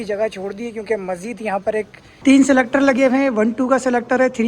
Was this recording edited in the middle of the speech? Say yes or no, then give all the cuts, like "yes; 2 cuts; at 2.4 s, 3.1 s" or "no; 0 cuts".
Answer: yes; 1 cut; at 2.0 s